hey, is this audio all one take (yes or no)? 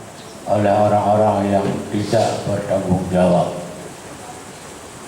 no